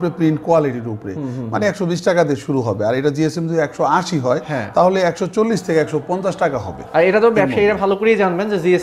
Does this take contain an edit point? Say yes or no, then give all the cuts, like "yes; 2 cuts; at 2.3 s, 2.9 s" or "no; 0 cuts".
no; 0 cuts